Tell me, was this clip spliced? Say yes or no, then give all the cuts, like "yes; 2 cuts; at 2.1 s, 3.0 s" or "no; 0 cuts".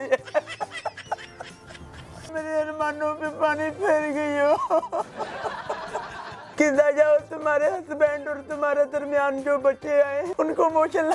yes; 3 cuts; at 2.3 s, 6.2 s, 10.3 s